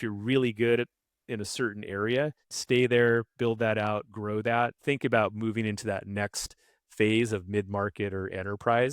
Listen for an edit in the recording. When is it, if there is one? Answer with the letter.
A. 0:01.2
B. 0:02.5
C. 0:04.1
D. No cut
B